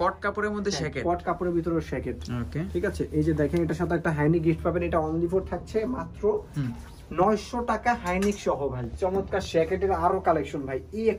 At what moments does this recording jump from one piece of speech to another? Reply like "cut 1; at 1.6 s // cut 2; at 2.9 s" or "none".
none